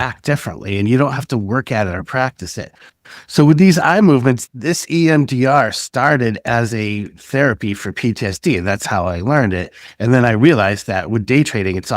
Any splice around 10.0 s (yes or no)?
no